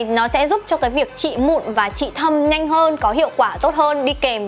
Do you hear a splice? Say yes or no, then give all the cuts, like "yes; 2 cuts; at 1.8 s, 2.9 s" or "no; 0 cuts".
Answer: no; 0 cuts